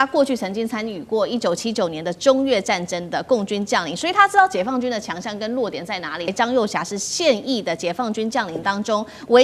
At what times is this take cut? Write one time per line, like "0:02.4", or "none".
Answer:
0:06.3